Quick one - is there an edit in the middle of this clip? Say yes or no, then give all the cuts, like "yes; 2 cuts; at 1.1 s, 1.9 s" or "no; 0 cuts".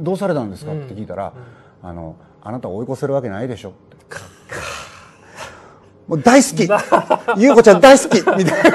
no; 0 cuts